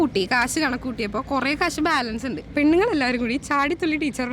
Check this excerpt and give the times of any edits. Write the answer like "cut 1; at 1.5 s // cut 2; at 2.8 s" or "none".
cut 1; at 2.4 s